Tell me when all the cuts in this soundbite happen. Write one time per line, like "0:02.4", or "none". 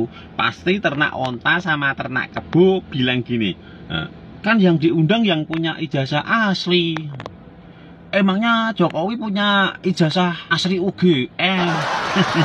none